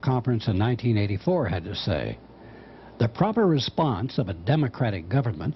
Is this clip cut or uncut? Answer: cut